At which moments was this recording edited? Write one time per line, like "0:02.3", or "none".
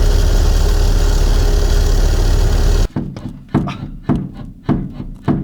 0:02.9